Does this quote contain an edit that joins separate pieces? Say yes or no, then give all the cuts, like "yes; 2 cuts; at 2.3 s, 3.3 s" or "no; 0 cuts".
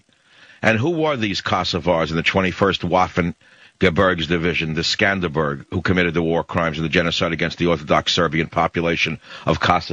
yes; 1 cut; at 2.9 s